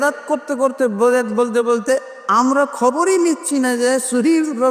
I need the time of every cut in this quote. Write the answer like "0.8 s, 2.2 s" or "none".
none